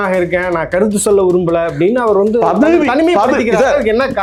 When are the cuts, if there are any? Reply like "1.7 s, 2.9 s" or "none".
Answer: none